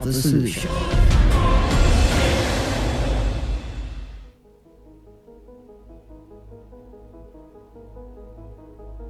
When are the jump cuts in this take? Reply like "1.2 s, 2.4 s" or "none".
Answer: 4.3 s